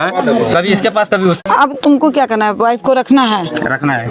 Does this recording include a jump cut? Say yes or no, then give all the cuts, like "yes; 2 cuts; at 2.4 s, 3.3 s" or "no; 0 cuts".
yes; 1 cut; at 1.4 s